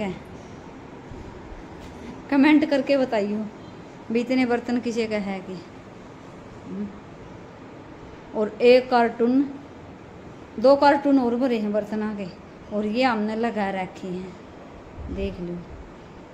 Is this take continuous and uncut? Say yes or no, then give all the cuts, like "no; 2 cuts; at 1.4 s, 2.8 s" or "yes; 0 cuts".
yes; 0 cuts